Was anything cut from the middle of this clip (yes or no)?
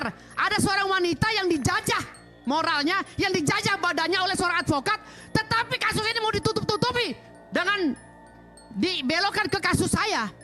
no